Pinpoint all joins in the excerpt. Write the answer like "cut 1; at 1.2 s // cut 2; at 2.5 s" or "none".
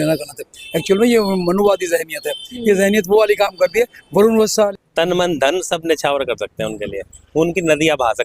cut 1; at 4.7 s

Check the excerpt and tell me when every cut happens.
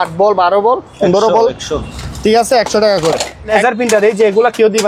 cut 1; at 3.5 s

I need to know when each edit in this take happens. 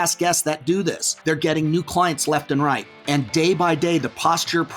cut 1; at 1.1 s // cut 2; at 2.9 s

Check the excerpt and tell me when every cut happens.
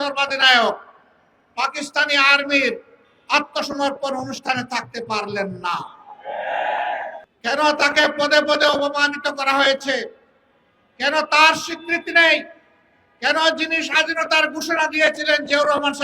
cut 1; at 7.3 s

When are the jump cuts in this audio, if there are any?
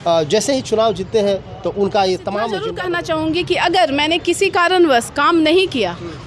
cut 1; at 2.7 s

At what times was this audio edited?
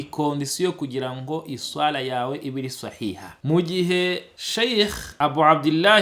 cut 1; at 3.3 s

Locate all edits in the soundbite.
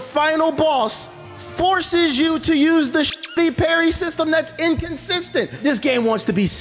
cut 1; at 5.6 s

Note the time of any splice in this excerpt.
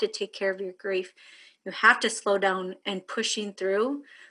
none

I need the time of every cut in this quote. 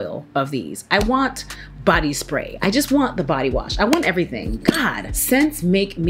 none

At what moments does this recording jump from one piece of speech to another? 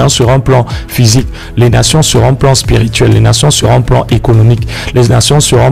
none

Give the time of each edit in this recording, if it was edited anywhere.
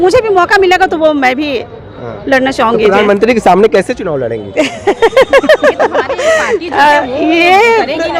none

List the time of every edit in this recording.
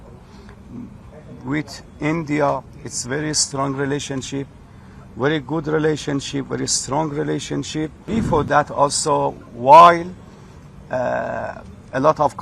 cut 1; at 8.1 s

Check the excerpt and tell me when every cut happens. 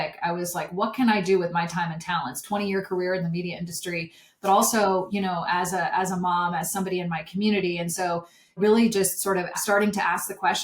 cut 1; at 2.4 s // cut 2; at 8.6 s // cut 3; at 9.6 s

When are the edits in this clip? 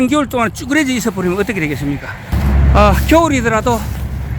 cut 1; at 2.3 s

